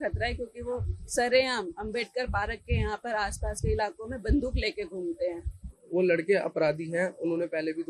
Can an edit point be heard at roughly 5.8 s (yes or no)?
yes